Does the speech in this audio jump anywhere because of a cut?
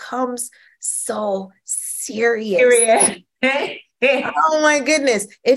no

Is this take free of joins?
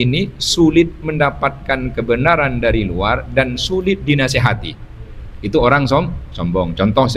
yes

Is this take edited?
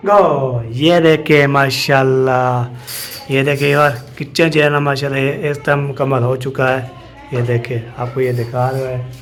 no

